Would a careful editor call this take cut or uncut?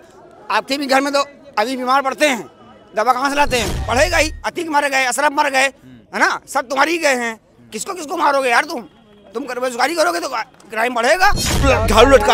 cut